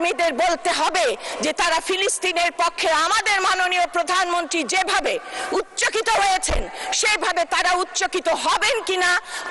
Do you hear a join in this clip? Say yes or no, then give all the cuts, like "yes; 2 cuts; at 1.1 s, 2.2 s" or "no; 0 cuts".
no; 0 cuts